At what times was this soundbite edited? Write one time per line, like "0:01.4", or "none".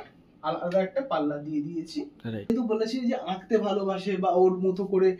0:02.5